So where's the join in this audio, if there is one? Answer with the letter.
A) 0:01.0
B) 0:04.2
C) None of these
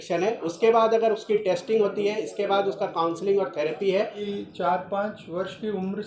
B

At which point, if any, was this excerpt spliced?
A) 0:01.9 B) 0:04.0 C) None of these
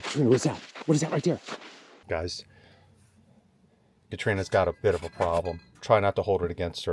A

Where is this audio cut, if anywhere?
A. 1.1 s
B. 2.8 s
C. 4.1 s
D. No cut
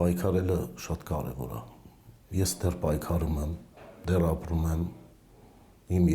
D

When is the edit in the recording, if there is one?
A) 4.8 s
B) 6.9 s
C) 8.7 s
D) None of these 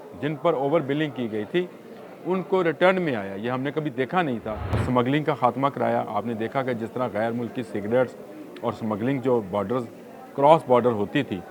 A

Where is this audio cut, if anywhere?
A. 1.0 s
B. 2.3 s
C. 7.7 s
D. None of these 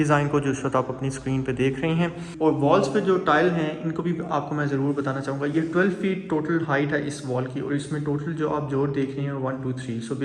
B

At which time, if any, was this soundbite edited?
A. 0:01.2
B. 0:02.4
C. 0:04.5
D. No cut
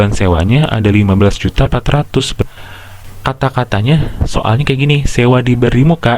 B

